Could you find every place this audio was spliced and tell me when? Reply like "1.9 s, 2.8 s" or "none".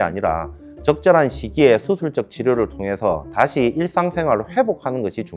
none